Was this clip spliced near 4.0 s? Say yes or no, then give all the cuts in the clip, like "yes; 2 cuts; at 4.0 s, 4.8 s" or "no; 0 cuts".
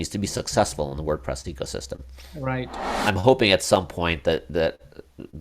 no; 1 cut; at 2.8 s